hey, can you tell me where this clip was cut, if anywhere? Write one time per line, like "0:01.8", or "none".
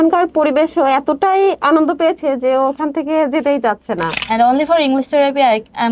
0:04.1